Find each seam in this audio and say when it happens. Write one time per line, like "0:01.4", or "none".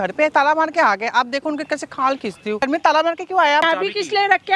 0:02.6
0:03.6